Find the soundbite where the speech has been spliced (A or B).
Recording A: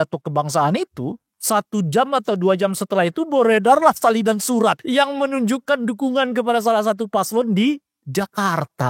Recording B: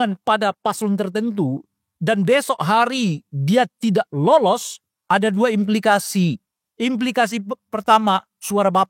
A